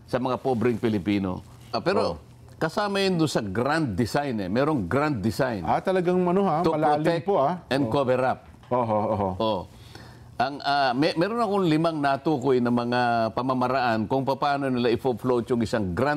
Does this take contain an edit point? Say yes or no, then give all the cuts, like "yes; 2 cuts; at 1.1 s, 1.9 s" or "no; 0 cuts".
yes; 1 cut; at 1.7 s